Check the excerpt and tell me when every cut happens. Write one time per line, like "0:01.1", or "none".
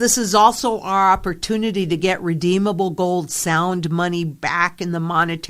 none